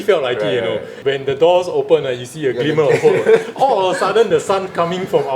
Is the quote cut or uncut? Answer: cut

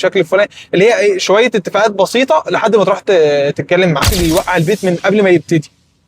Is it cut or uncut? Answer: cut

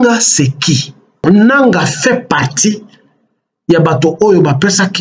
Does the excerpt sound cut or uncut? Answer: cut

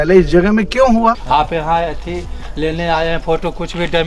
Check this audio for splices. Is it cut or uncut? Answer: cut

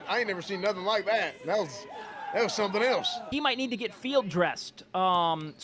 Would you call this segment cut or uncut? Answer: uncut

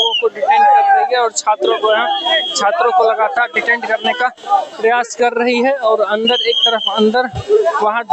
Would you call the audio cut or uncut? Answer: uncut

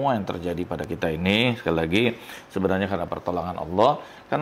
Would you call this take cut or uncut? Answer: uncut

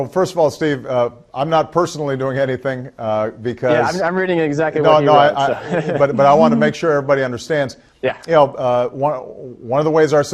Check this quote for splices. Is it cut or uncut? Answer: uncut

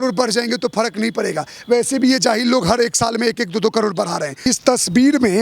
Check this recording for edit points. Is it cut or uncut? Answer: cut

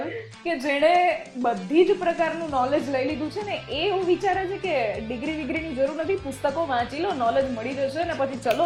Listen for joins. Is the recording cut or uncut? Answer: uncut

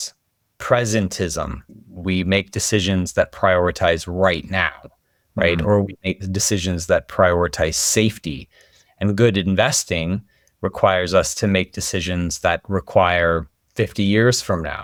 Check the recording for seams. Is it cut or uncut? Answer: uncut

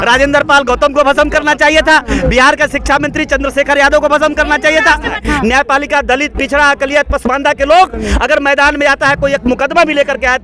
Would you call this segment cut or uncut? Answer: cut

